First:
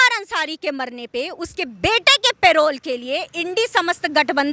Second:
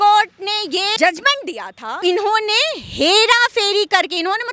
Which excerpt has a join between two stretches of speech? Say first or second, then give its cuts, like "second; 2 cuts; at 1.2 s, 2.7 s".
second; 2 cuts; at 1.0 s, 1.9 s